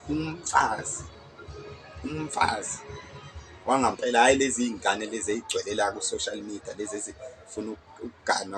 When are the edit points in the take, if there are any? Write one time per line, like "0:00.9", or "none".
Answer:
none